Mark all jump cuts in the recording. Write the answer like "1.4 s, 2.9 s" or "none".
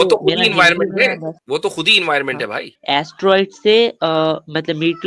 1.3 s, 2.7 s